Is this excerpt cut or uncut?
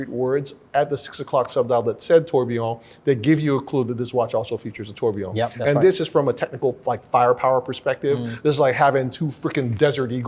uncut